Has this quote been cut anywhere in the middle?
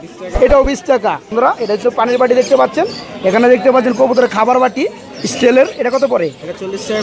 yes; 1 cut; at 1.3 s

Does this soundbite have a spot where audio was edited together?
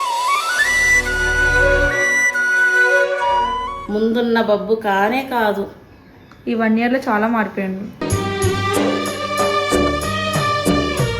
yes; 1 cut; at 3.8 s

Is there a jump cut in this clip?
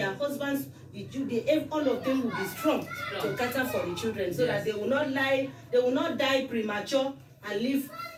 no; 0 cuts

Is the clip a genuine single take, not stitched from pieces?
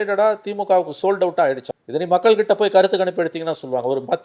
no; 1 cut; at 1.7 s

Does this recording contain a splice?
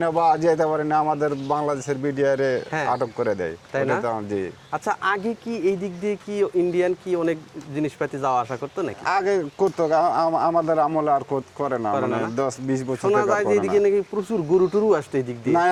no; 0 cuts

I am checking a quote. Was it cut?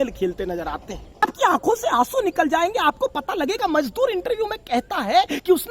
yes; 1 cut; at 1.2 s

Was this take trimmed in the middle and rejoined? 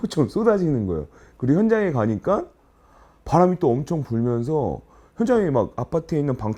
no; 0 cuts

